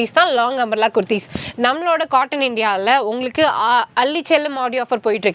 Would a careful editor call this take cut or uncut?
uncut